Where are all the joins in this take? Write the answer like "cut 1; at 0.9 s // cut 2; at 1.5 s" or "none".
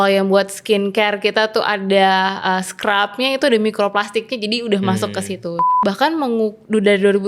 cut 1; at 5.7 s